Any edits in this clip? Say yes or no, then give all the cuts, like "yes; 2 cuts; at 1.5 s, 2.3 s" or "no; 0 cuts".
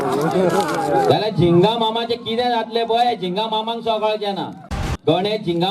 yes; 1 cut; at 4.6 s